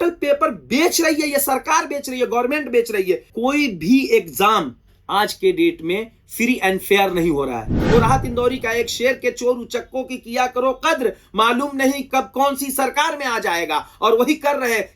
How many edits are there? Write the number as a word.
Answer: three